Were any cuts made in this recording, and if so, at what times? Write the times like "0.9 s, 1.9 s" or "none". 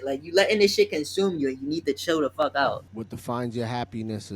2.9 s